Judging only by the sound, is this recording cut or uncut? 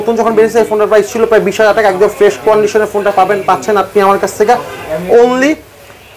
uncut